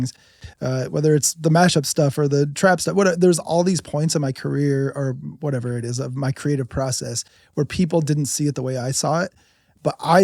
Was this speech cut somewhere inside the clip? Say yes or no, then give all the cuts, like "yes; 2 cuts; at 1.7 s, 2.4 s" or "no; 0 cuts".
no; 0 cuts